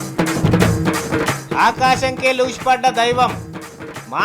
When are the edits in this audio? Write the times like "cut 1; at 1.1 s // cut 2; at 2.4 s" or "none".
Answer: none